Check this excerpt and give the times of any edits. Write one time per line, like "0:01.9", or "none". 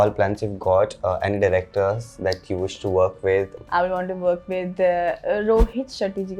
0:03.5